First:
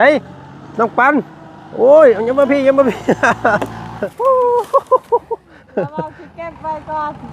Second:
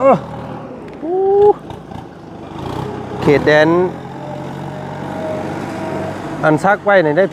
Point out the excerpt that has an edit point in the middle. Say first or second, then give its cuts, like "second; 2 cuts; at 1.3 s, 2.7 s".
first; 1 cut; at 4.0 s